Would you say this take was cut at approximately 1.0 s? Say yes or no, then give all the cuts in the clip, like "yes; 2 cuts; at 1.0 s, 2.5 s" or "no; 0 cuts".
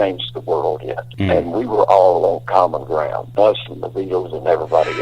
yes; 2 cuts; at 1.0 s, 3.2 s